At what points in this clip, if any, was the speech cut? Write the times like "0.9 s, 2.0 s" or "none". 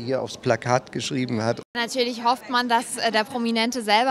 1.6 s